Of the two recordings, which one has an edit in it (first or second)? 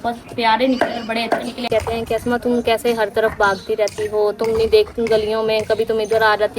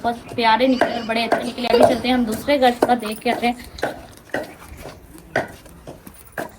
first